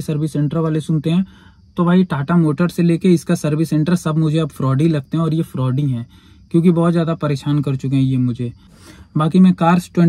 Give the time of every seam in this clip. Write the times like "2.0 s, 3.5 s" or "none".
8.8 s